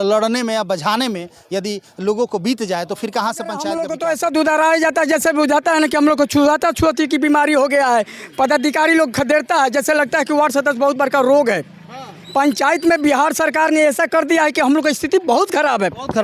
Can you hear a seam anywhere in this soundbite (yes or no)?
yes